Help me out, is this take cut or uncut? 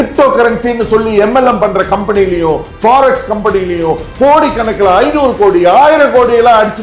uncut